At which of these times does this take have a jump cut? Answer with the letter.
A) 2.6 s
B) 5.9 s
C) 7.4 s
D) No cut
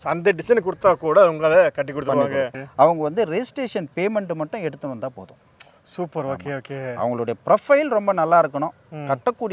A